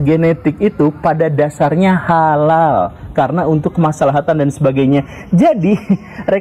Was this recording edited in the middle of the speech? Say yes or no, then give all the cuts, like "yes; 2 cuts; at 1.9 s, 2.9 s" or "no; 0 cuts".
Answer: no; 0 cuts